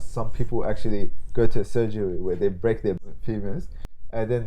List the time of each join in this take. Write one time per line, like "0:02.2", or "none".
0:03.0